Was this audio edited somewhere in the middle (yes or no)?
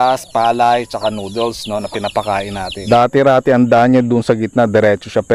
yes